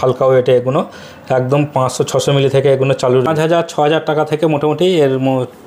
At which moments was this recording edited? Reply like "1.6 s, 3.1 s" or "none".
3.3 s